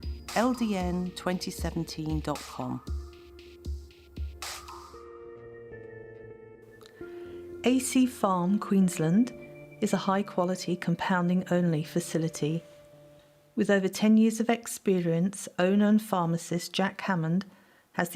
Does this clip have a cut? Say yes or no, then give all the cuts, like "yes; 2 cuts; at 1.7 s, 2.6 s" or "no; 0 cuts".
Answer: yes; 1 cut; at 7.6 s